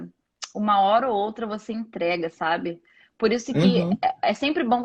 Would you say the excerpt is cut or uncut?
uncut